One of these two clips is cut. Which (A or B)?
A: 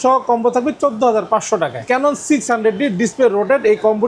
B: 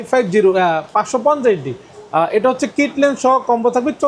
A